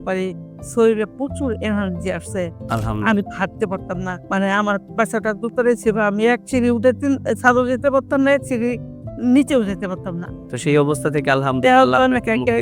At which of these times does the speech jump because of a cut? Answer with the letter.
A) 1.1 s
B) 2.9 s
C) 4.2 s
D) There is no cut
C